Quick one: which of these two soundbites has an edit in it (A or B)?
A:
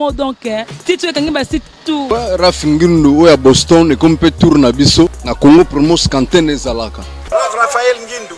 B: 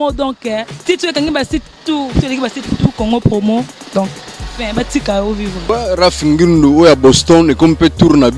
A